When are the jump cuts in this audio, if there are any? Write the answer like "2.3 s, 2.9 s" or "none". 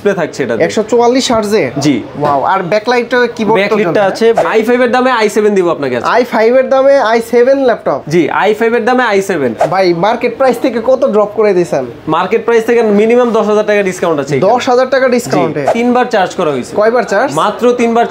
4.4 s, 9.6 s, 15.7 s